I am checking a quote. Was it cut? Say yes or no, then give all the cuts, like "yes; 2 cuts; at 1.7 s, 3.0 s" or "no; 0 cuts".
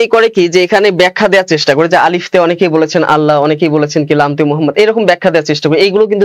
no; 0 cuts